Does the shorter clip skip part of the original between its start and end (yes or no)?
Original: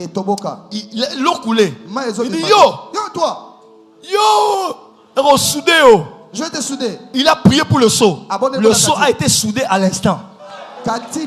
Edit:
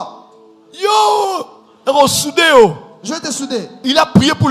no